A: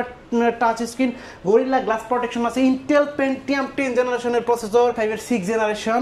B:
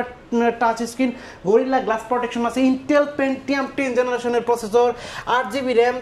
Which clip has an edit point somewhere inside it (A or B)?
A